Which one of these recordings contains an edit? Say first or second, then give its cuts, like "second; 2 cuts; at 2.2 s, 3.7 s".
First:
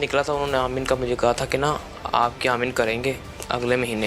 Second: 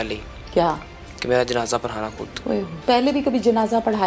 second; 1 cut; at 2.7 s